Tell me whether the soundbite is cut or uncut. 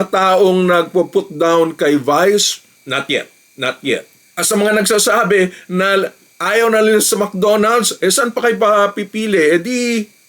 uncut